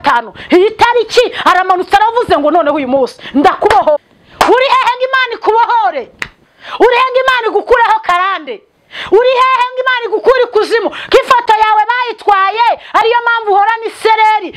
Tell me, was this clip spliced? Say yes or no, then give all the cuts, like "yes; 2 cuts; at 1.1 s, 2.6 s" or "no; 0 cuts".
yes; 1 cut; at 4.0 s